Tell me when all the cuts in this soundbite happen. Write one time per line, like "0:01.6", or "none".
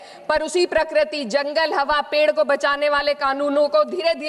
none